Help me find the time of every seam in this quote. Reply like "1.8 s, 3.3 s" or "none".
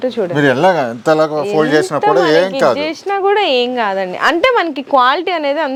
none